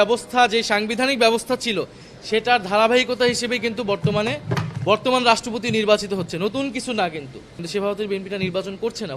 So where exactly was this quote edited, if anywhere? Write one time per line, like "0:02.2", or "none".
0:07.6